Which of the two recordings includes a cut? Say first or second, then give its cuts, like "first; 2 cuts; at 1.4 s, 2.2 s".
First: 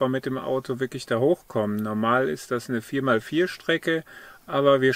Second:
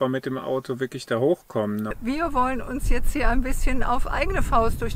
second; 1 cut; at 1.9 s